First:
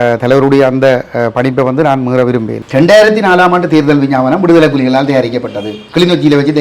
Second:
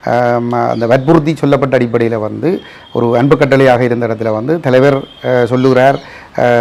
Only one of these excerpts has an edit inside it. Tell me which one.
first; 1 cut; at 2.6 s

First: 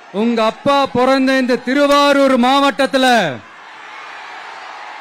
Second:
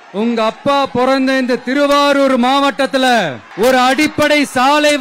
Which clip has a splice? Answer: second; 1 cut; at 3.4 s

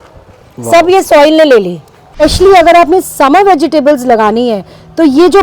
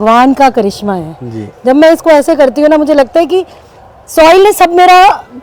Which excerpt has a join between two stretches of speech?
first; 1 cut; at 2.2 s

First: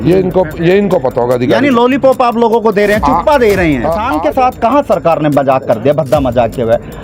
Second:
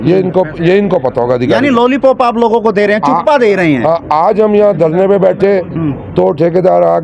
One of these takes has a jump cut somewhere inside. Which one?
first; 1 cut; at 4.1 s

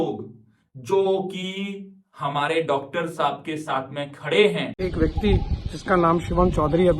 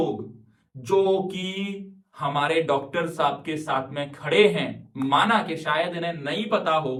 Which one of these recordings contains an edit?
first; 1 cut; at 4.8 s

